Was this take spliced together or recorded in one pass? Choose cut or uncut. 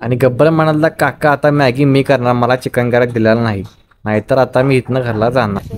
uncut